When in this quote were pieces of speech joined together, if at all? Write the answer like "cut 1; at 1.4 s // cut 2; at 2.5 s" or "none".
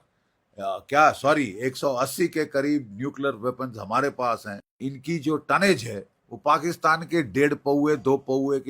cut 1; at 4.7 s